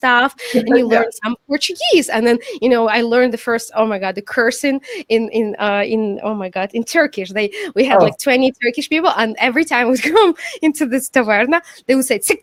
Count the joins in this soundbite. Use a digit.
0